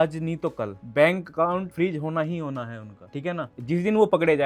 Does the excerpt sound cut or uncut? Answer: uncut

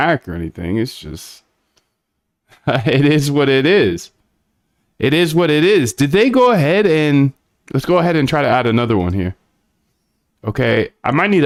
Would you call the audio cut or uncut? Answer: uncut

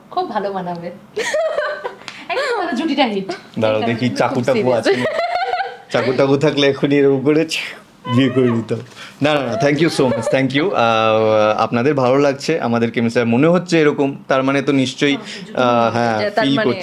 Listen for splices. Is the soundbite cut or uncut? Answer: uncut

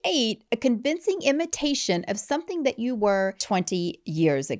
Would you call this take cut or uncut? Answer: cut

